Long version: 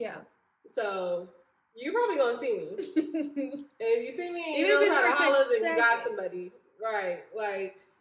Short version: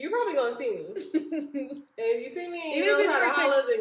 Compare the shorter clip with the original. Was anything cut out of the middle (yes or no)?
no